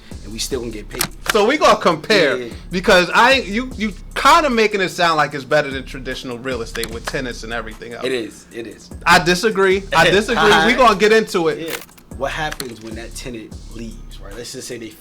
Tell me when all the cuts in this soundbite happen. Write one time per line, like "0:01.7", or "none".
0:01.3
0:11.7